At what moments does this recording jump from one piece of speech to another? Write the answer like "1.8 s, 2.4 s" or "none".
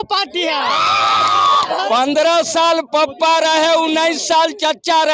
1.9 s